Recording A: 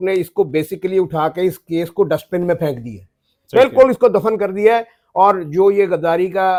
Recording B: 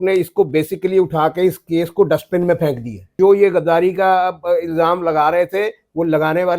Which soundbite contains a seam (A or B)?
B